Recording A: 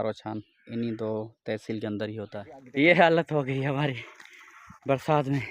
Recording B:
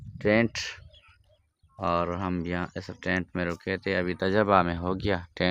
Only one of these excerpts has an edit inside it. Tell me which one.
A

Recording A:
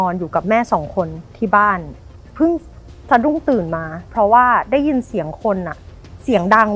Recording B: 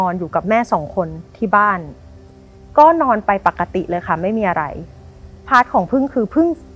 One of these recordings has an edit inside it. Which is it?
A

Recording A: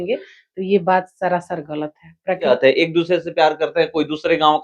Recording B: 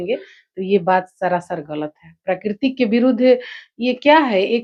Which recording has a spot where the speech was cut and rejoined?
A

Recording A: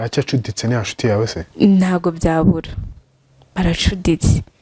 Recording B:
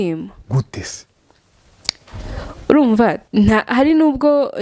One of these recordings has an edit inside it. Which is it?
B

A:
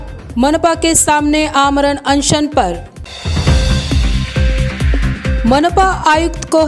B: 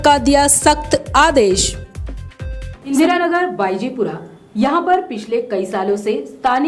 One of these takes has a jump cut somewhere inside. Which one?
B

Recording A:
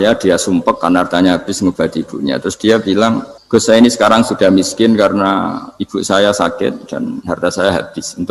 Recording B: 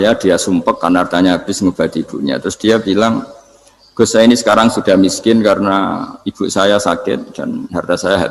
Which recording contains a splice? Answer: A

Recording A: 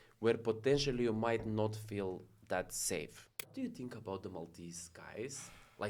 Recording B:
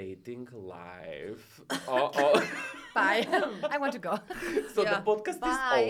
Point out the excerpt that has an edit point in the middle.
A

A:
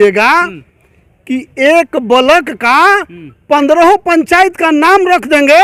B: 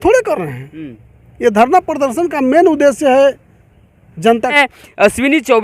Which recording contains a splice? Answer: B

